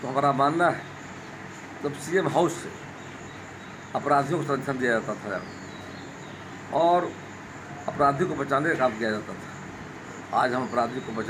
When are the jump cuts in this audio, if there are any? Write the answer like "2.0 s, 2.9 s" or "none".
none